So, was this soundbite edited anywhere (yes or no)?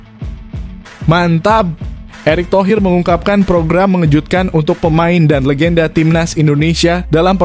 yes